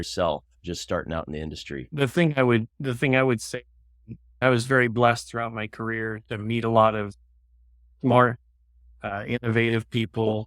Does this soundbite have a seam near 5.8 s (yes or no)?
no